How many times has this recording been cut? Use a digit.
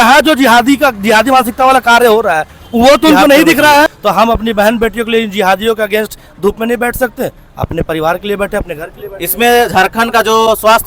1